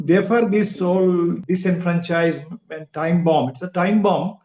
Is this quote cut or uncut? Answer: cut